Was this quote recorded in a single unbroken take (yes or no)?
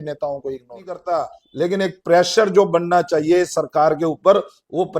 no